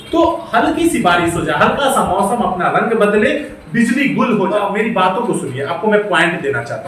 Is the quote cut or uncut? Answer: cut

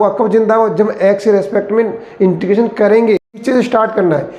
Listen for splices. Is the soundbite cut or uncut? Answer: cut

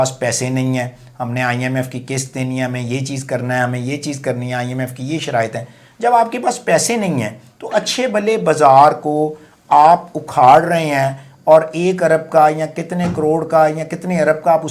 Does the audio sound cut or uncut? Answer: uncut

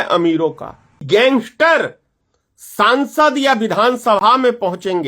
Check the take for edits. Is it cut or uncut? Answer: cut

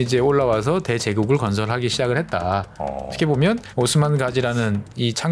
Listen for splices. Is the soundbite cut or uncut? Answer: cut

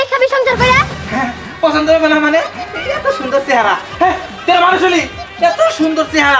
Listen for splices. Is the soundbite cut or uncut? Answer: cut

